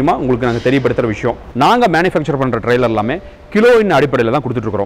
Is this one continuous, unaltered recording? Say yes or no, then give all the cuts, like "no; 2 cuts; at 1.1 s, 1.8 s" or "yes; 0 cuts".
no; 1 cut; at 1.4 s